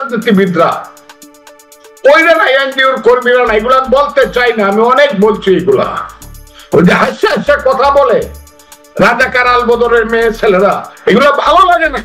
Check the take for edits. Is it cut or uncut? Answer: uncut